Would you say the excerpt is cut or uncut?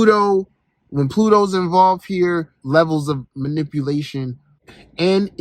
cut